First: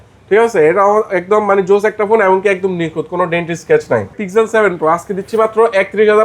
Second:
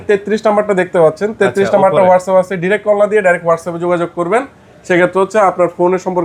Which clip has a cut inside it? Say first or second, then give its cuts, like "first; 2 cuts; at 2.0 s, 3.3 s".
first; 1 cut; at 4.2 s